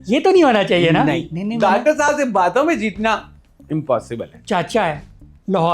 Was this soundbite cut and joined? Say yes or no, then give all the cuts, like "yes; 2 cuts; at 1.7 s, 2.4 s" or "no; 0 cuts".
yes; 2 cuts; at 1.2 s, 4.4 s